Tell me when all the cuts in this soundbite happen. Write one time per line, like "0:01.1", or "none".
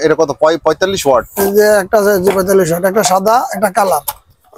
none